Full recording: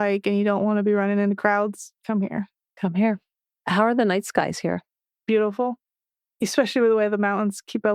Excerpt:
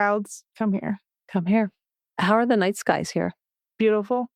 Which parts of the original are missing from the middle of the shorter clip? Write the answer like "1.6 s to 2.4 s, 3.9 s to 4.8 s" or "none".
none